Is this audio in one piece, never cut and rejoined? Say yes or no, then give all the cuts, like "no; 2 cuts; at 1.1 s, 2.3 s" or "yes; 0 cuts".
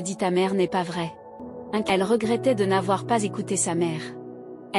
no; 1 cut; at 1.8 s